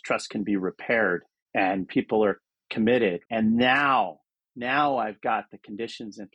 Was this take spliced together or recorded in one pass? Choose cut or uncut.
cut